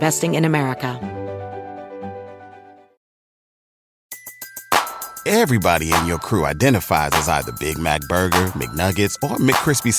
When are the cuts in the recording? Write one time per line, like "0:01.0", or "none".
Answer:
0:01.0